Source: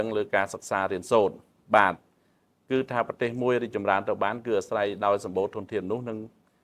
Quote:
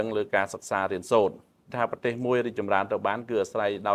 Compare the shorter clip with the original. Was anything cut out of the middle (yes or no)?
yes